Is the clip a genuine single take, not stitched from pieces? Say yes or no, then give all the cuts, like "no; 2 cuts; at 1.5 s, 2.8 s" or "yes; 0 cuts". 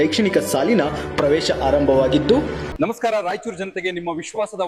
no; 1 cut; at 2.6 s